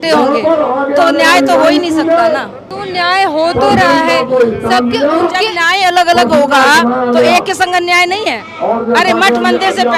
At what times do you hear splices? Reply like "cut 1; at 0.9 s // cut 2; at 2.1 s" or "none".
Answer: none